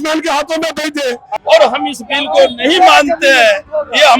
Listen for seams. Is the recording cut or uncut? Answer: cut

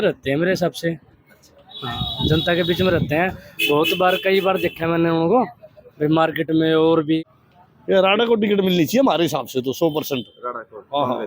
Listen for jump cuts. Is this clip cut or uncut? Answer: cut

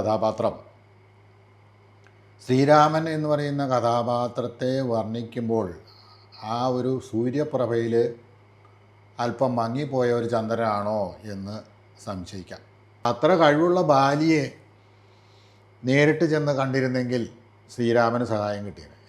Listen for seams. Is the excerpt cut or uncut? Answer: cut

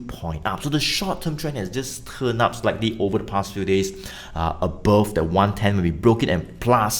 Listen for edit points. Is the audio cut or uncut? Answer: uncut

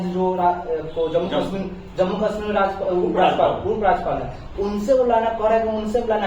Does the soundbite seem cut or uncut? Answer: uncut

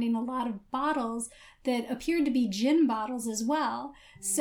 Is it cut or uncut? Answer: uncut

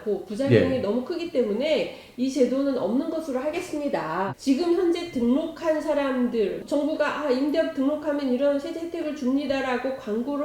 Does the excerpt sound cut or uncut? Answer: cut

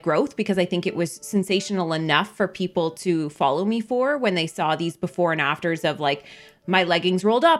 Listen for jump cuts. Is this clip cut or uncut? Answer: uncut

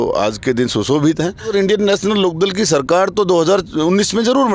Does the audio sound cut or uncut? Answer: cut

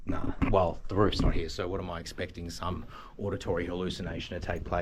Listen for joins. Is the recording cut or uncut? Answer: uncut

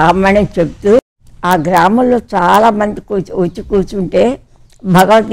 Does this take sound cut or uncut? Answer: cut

